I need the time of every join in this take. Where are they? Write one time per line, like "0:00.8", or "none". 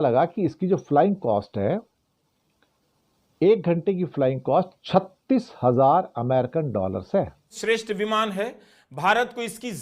0:07.5